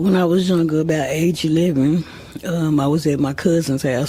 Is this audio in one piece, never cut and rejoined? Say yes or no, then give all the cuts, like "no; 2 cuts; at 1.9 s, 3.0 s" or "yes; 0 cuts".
yes; 0 cuts